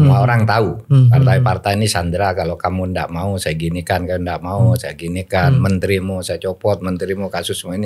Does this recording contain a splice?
no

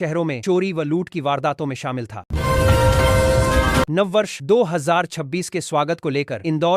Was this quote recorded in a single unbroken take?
no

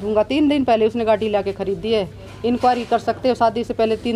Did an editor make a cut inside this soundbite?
no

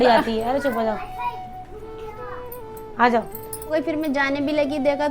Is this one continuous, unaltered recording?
no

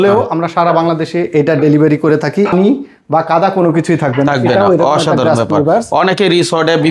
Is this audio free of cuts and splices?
no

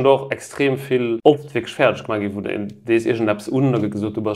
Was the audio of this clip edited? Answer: yes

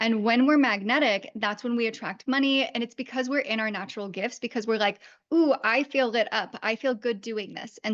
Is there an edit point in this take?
no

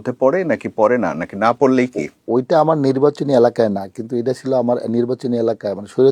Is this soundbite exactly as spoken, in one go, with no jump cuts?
yes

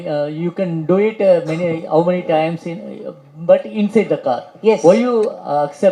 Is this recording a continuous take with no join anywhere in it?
yes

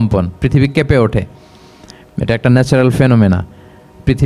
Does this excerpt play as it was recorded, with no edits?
yes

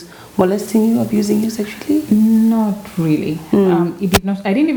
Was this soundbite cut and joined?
no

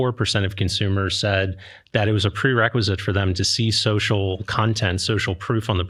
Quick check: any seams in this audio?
no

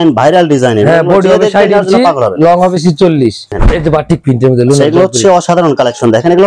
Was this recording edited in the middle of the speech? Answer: yes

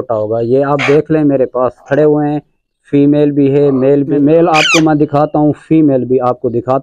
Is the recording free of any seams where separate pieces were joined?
no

